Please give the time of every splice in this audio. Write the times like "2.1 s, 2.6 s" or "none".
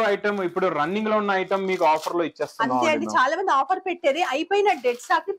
none